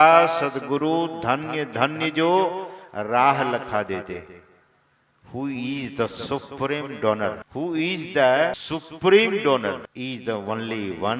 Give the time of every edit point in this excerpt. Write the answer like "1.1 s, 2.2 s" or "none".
7.4 s, 8.6 s, 9.9 s